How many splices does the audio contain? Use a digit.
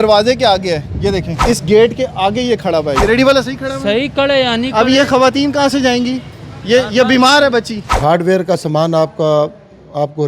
3